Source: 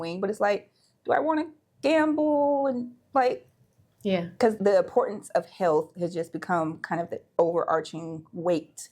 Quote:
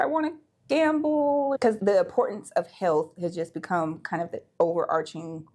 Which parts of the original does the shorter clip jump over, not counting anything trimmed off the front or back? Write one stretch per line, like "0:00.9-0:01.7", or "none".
0:02.7-0:04.4